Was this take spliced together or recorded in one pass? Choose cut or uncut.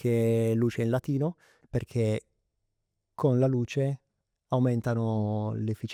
uncut